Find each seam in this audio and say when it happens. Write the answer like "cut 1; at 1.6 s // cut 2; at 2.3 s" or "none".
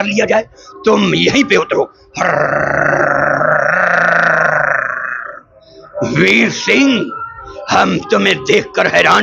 none